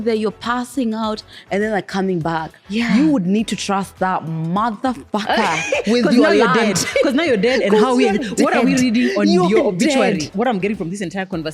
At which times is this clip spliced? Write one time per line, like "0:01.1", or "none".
0:10.3